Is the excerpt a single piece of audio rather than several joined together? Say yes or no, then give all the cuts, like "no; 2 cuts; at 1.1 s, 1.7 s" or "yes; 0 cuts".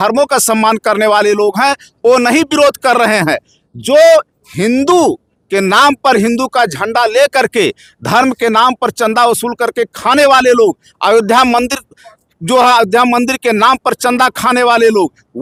yes; 0 cuts